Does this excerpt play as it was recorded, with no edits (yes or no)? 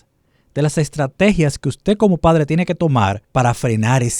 no